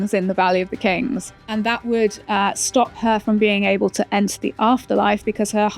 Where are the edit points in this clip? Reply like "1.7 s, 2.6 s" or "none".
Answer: 1.3 s